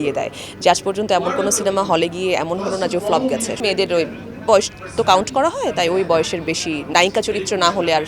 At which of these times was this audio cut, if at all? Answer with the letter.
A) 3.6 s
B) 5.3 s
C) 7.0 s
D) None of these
A